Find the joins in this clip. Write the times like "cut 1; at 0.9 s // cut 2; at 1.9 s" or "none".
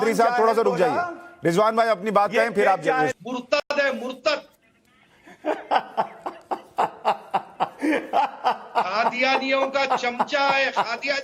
cut 1; at 3.1 s